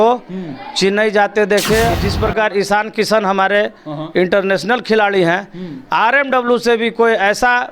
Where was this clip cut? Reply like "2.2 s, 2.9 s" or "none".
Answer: 2.1 s